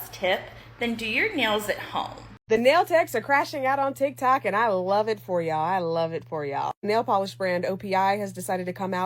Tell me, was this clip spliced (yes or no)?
yes